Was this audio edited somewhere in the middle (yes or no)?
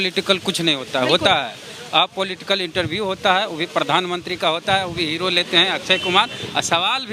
no